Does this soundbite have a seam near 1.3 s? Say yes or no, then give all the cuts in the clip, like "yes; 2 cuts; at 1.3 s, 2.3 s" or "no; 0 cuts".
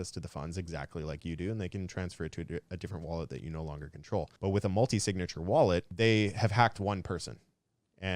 no; 2 cuts; at 4.3 s, 5.9 s